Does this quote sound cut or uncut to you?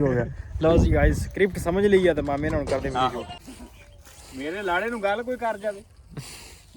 cut